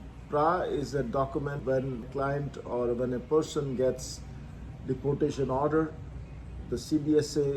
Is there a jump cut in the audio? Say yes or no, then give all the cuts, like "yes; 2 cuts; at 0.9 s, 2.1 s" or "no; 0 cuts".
yes; 1 cut; at 1.7 s